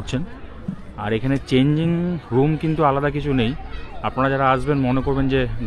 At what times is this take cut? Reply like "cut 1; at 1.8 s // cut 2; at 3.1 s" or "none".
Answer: none